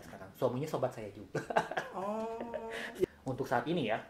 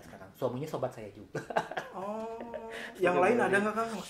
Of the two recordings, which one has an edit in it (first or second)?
first